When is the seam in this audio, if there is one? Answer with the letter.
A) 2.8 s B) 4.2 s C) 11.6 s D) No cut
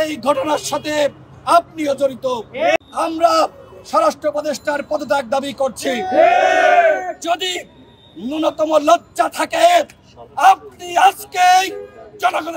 A